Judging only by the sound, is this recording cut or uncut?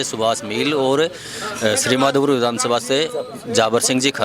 uncut